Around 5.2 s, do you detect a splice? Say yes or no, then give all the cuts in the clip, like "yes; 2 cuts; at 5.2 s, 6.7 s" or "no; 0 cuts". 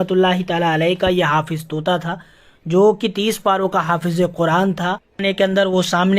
yes; 1 cut; at 5.2 s